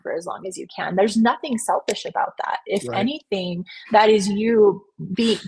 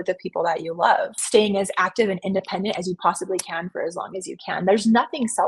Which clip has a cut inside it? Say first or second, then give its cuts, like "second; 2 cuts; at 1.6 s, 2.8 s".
second; 1 cut; at 1.2 s